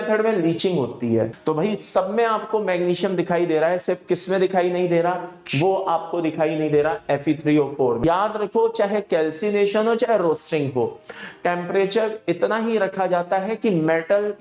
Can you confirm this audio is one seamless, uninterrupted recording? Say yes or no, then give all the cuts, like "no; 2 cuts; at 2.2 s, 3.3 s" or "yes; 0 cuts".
no; 2 cuts; at 1.4 s, 8.0 s